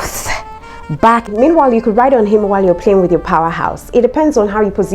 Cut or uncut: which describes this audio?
cut